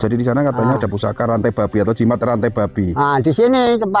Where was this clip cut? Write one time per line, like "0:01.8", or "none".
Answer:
none